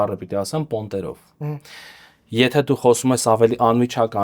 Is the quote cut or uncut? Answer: uncut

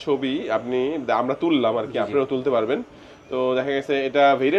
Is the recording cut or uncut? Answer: uncut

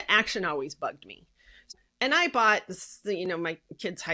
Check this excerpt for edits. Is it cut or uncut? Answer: cut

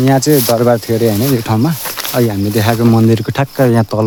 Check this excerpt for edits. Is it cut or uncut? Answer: uncut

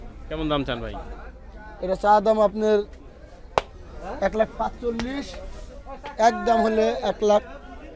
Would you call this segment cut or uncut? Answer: uncut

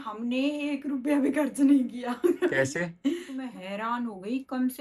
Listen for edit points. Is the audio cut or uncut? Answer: cut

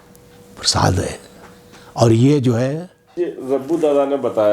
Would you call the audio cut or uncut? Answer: cut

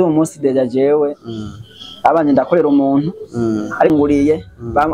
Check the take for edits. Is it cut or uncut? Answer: cut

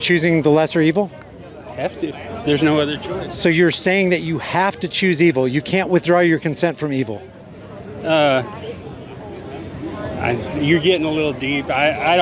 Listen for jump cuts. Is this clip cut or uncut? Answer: uncut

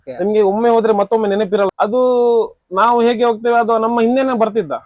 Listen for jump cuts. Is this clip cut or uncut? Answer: cut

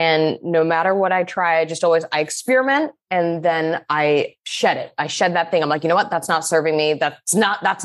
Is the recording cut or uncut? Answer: uncut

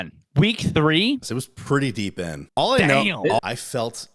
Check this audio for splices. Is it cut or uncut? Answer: cut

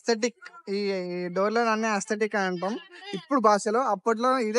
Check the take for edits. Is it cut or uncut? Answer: uncut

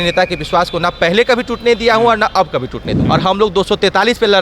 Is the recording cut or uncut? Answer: cut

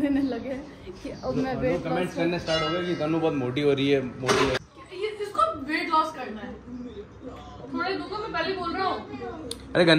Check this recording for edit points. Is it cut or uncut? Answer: cut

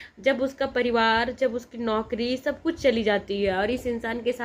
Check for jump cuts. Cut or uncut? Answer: uncut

